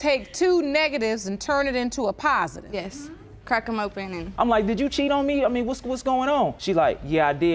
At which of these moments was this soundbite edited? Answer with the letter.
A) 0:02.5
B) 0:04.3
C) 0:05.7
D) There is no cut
B